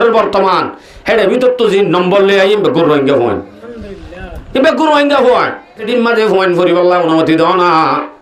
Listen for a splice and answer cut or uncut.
cut